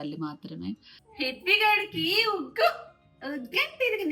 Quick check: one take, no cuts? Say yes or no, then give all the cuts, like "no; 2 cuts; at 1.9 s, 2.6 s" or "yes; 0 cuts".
no; 1 cut; at 1.0 s